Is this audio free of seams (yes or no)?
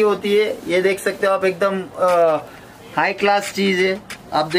yes